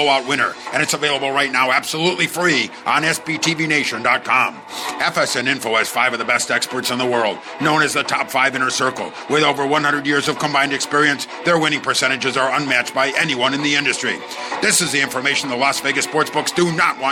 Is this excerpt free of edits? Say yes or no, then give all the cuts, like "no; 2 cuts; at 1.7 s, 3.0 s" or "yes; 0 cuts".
yes; 0 cuts